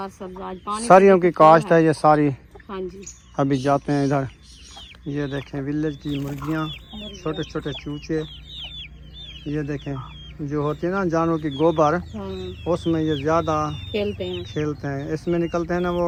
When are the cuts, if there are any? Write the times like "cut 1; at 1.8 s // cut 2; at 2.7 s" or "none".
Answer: none